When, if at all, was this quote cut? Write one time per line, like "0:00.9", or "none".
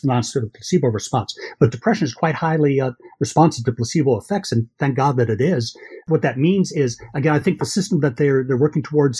0:06.0